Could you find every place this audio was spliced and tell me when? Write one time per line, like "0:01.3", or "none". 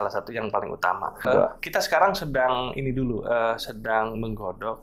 0:01.3